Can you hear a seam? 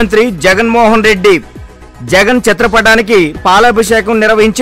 no; 0 cuts

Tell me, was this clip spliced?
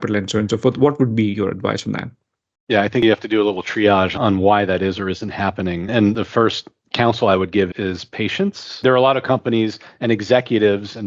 yes; 2 cuts; at 6.2 s, 8.8 s

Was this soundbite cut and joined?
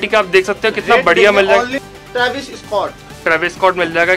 yes; 1 cut; at 1.8 s

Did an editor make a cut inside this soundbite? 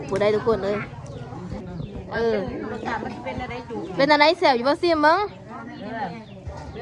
yes; 1 cut; at 1.6 s

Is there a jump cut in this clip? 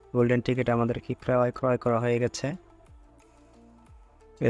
no; 0 cuts

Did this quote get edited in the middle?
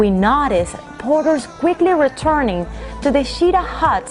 no; 0 cuts

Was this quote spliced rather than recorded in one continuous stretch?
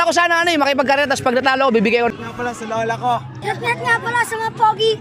yes; 2 cuts; at 2.1 s, 3.3 s

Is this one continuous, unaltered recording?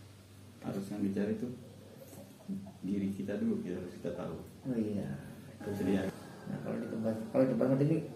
no; 1 cut; at 6.1 s

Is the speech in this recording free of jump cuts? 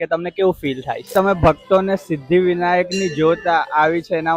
no; 1 cut; at 1.1 s

